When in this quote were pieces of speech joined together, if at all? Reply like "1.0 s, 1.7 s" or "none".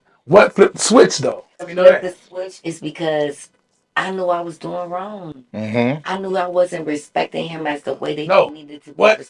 1.7 s